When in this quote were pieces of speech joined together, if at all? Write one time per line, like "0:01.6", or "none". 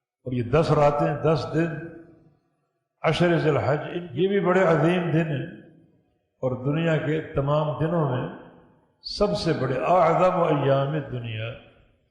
0:04.0